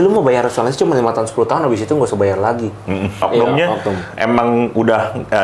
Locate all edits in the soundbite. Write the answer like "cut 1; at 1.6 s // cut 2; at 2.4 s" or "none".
cut 1; at 3.2 s